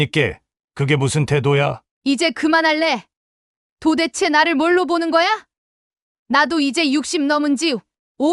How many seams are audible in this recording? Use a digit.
1